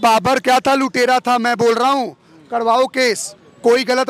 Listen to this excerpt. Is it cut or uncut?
uncut